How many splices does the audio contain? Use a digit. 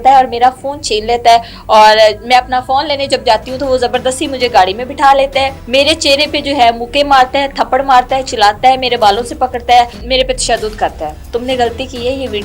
3